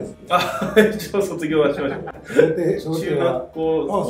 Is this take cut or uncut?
uncut